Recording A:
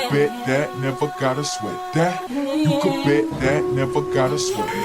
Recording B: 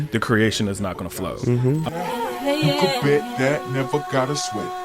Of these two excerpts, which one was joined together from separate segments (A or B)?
B